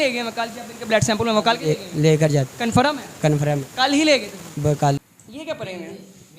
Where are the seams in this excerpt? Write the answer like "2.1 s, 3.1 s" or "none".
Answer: 5.0 s